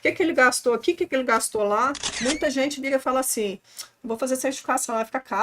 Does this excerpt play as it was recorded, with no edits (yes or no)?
no